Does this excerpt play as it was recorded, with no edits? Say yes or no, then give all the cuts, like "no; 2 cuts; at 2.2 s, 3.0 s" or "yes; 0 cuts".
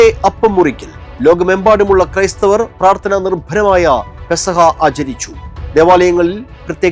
yes; 0 cuts